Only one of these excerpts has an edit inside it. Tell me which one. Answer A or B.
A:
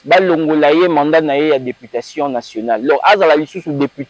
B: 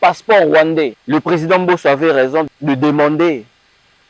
B